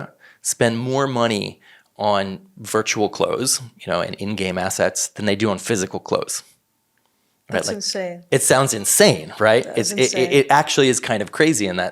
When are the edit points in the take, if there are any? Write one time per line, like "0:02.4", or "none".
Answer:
none